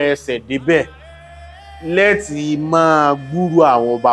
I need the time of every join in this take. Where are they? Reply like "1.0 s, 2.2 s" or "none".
none